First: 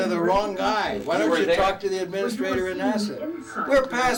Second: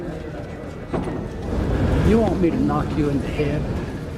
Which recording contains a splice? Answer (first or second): second